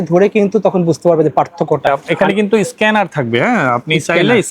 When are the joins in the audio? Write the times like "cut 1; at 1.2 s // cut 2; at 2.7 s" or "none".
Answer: cut 1; at 1.9 s